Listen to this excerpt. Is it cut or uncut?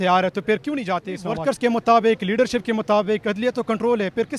cut